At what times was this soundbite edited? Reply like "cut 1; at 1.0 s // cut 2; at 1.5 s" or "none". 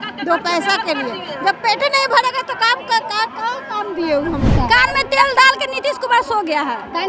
cut 1; at 4.5 s